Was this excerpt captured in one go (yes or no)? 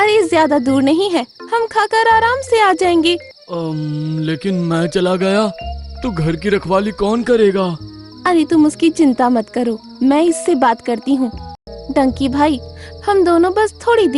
no